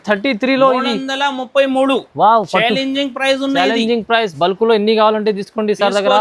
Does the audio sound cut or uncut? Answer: uncut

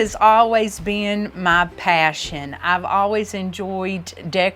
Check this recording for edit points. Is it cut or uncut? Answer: uncut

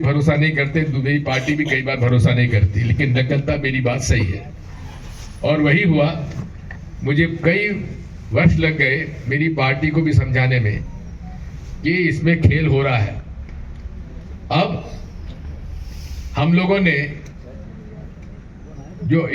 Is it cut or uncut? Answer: uncut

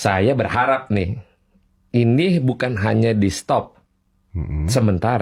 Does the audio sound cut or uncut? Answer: uncut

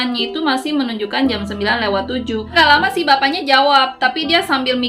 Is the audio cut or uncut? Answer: cut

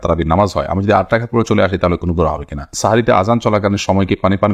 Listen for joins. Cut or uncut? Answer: cut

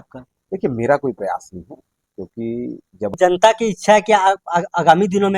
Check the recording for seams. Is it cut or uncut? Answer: cut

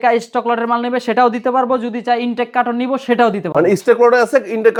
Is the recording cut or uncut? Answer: uncut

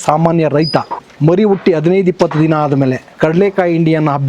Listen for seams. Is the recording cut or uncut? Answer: cut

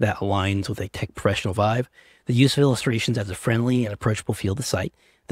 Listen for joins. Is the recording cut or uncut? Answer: cut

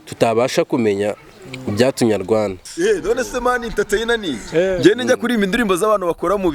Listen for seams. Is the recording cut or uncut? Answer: cut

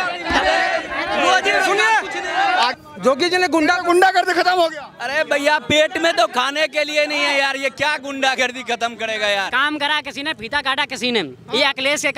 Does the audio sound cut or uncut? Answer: cut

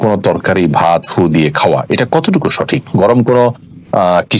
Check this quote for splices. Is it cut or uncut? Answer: uncut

